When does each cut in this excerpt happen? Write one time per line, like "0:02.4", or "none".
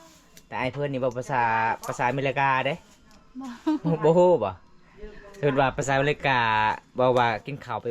0:05.8